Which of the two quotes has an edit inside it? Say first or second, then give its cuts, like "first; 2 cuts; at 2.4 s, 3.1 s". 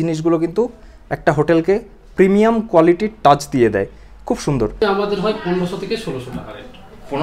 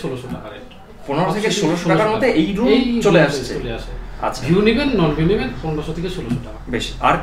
first; 1 cut; at 4.8 s